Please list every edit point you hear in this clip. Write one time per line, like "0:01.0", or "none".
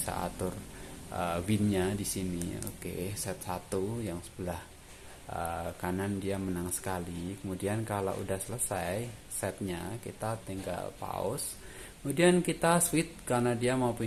none